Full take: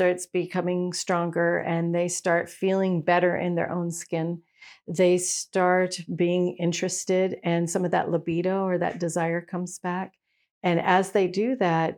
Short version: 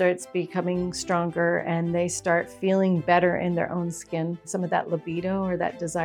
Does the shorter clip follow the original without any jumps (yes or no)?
no